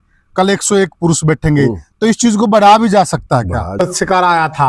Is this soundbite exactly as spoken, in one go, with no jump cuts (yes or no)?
no